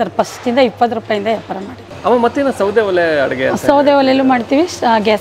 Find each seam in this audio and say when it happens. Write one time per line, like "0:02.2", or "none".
none